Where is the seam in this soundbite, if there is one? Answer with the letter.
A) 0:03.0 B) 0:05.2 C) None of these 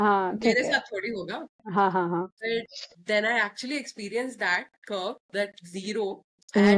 C